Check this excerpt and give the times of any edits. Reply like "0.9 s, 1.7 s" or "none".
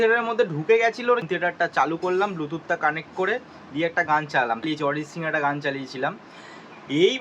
1.0 s, 4.6 s